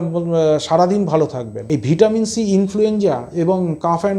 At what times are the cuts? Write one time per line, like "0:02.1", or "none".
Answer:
0:01.5